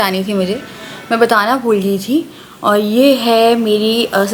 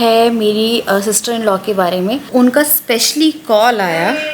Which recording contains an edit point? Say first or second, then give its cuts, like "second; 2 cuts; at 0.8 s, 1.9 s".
second; 1 cut; at 2.3 s